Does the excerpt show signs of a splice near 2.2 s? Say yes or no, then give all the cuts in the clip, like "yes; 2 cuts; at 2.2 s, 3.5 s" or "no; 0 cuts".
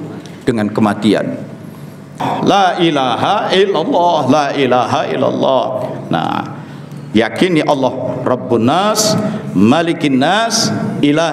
yes; 1 cut; at 2.2 s